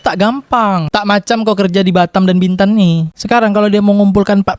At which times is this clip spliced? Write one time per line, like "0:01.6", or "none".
0:03.1